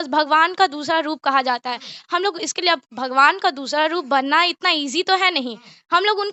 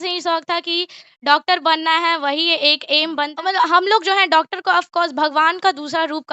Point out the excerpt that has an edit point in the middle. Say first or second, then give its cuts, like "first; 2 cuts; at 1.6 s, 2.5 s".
second; 1 cut; at 3.3 s